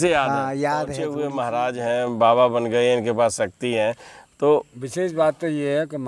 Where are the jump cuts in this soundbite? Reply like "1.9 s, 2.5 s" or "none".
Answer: 1.0 s